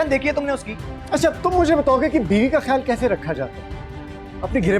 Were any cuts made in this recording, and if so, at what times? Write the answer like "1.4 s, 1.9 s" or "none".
none